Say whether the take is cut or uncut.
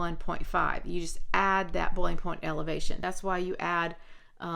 cut